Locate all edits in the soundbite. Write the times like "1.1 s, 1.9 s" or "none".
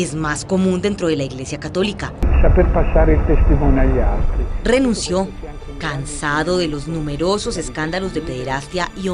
2.2 s